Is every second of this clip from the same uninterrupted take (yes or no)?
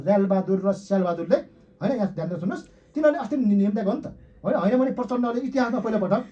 yes